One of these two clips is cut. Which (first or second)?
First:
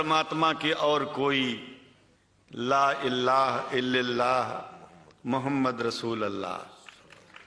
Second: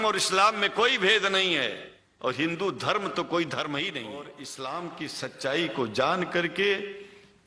second